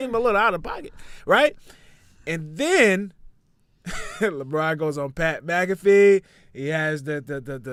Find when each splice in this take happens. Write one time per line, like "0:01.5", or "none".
none